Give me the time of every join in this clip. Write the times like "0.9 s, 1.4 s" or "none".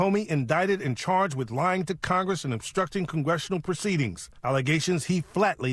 none